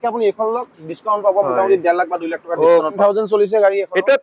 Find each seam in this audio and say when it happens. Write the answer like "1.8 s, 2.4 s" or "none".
3.0 s